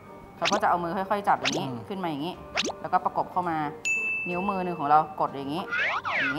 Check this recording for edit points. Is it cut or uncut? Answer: uncut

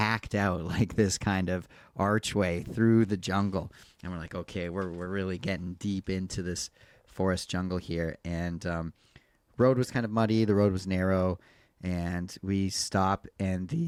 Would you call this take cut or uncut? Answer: uncut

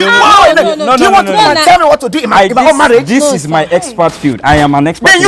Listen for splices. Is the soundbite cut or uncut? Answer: uncut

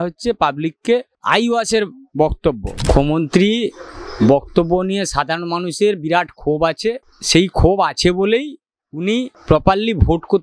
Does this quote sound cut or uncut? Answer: cut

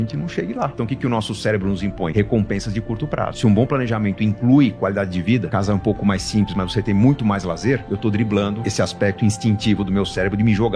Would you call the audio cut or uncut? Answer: cut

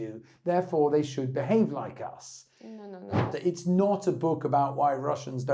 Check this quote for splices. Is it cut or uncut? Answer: cut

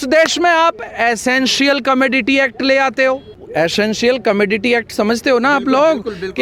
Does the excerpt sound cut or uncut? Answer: cut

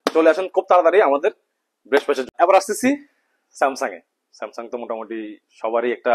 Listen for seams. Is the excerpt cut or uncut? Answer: uncut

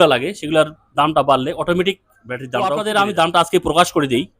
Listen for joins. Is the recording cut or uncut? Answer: cut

